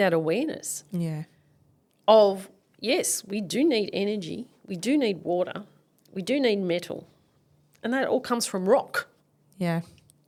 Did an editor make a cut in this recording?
no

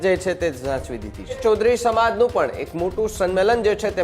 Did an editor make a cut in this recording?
yes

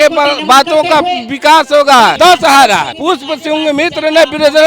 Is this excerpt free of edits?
no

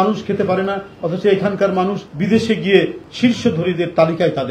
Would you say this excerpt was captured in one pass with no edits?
no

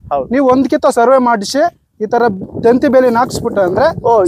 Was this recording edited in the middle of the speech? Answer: no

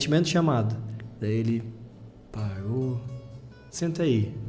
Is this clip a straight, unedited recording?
yes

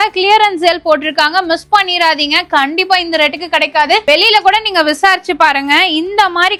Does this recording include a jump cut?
no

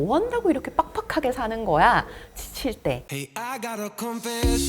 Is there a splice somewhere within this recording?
yes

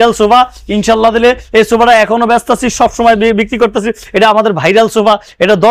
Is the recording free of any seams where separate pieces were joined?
yes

